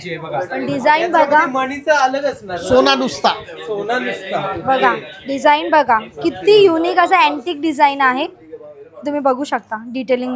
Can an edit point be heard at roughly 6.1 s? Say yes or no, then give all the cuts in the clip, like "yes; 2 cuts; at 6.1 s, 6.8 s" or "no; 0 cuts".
no; 0 cuts